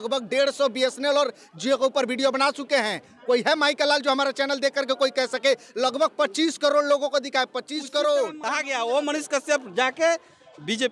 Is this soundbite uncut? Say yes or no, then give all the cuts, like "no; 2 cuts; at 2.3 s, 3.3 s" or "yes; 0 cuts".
no; 1 cut; at 8.4 s